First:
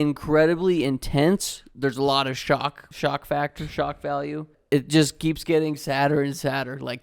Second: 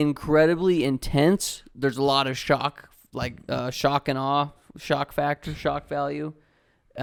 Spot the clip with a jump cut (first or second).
first